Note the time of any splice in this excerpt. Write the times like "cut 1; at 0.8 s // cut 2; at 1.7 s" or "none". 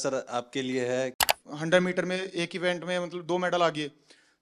cut 1; at 1.2 s